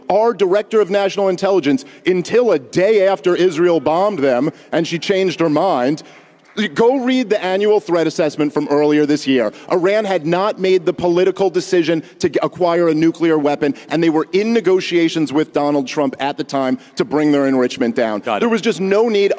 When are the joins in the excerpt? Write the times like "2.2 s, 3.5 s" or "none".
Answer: 13.8 s